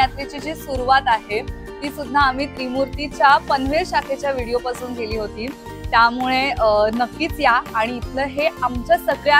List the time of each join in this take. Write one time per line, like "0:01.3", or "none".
none